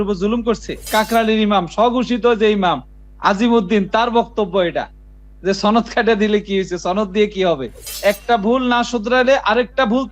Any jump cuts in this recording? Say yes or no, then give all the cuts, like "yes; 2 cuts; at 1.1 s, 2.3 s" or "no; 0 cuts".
yes; 2 cuts; at 0.9 s, 8.0 s